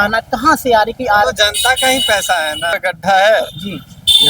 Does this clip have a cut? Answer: yes; 1 cut; at 2.7 s

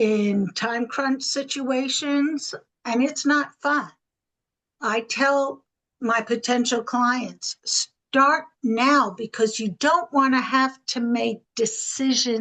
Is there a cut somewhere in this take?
no; 0 cuts

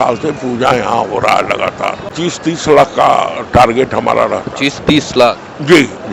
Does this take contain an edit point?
yes; 1 cut; at 2.2 s

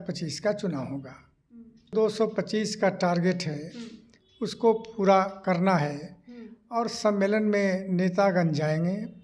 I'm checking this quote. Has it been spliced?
yes; 1 cut; at 1.9 s

